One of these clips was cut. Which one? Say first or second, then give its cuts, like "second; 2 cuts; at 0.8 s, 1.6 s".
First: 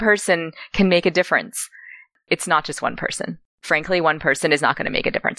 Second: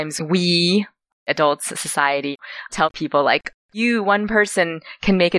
second; 2 cuts; at 1.3 s, 2.4 s